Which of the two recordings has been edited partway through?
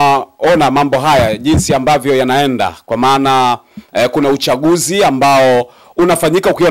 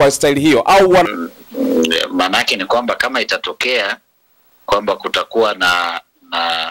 second; 1 cut; at 1.2 s

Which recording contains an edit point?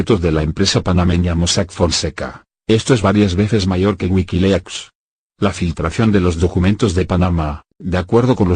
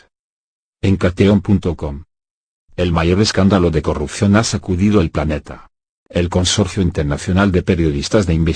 first; 1 cut; at 4.2 s

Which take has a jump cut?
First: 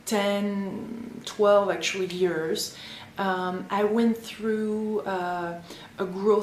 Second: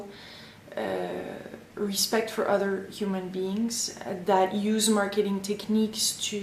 second; 1 cut; at 4.8 s

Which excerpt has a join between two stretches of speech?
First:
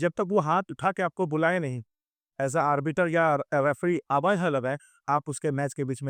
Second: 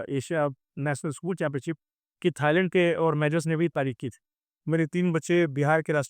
second; 1 cut; at 4.4 s

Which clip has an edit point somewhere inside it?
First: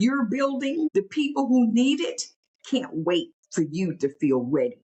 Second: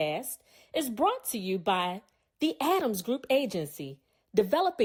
first; 2 cuts; at 0.9 s, 3.4 s

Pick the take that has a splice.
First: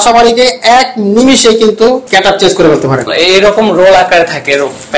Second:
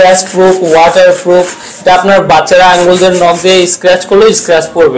first; 2 cuts; at 2.0 s, 3.1 s

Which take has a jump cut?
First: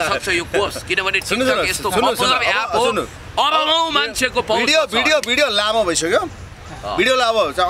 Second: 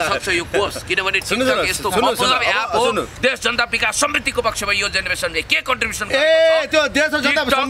second; 1 cut; at 3.1 s

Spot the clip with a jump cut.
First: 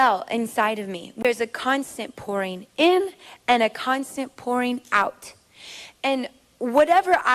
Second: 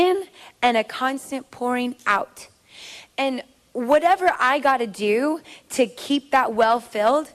first; 1 cut; at 1.1 s

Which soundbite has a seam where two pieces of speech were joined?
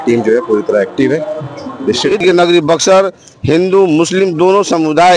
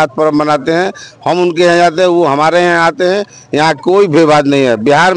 first; 1 cut; at 2.1 s

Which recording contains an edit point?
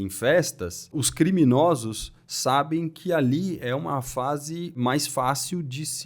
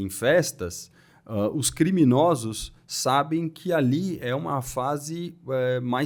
first; 2 cuts; at 1.0 s, 4.8 s

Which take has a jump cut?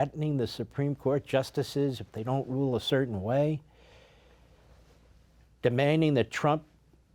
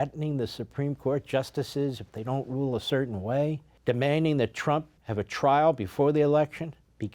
second; 2 cuts; at 3.7 s, 5.0 s

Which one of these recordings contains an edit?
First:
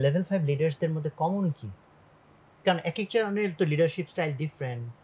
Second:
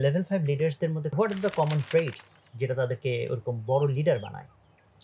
second; 1 cut; at 1.1 s

